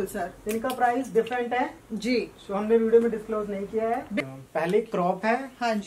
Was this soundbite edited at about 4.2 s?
yes; 1 cut; at 4.2 s

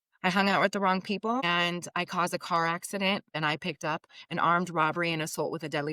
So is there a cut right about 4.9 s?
no; 2 cuts; at 1.4 s, 3.3 s

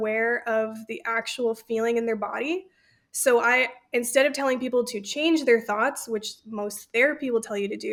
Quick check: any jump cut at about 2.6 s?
no; 0 cuts

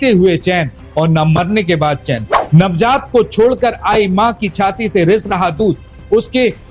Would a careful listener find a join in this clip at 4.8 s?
no; 1 cut; at 2.3 s

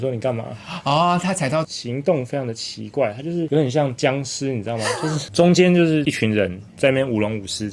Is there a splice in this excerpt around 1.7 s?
yes; 2 cuts; at 1.7 s, 5.3 s

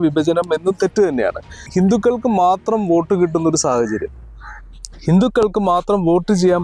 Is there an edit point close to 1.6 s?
yes; 1 cut; at 1.6 s

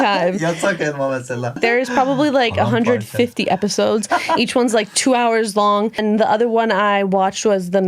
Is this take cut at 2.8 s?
no; 2 cuts; at 1.6 s, 6.0 s

